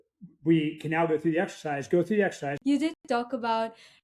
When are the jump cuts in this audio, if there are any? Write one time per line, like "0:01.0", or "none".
0:02.5